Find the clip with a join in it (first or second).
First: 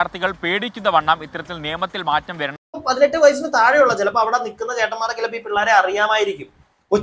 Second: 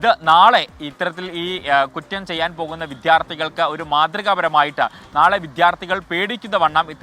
first